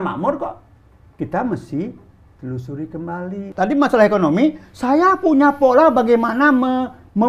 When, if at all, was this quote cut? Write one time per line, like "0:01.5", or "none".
0:03.4